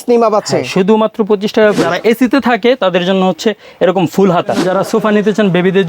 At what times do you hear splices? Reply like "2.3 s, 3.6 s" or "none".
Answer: 1.9 s, 4.7 s